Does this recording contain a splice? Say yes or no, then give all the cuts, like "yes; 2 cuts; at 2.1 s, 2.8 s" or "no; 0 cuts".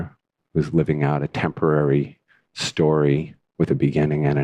yes; 1 cut; at 1.3 s